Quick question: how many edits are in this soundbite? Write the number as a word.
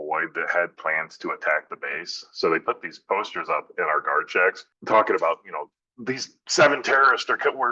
one